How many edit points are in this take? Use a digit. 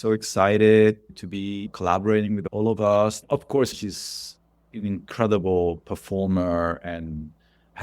3